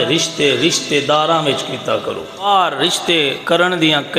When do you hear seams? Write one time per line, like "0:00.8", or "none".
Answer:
0:02.4
0:03.4